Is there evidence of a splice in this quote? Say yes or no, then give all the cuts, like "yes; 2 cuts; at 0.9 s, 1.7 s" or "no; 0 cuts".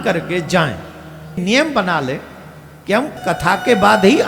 yes; 2 cuts; at 1.4 s, 3.2 s